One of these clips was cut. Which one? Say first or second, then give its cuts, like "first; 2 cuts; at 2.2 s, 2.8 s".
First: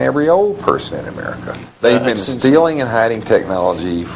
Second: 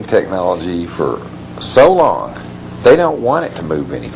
first; 1 cut; at 1.7 s